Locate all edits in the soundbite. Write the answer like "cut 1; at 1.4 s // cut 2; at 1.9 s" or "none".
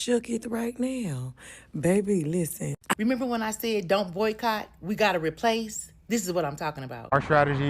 cut 1; at 2.9 s